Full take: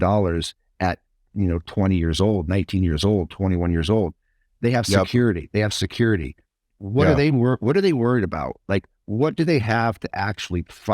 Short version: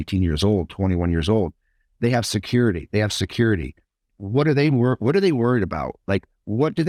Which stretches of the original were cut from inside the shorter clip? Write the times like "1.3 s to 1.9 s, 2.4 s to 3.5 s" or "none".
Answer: none

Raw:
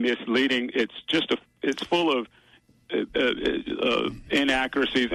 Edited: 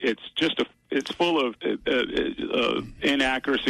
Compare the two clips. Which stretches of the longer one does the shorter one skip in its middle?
2.3 s to 2.8 s

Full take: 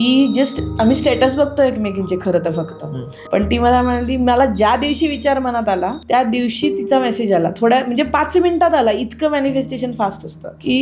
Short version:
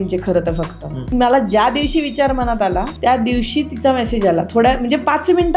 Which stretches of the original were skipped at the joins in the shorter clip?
3.1 s to 4.2 s

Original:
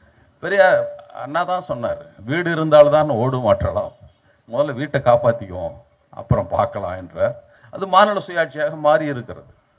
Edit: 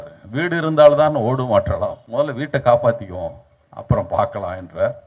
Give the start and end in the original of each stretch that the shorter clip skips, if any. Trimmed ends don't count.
4.0 s to 4.4 s

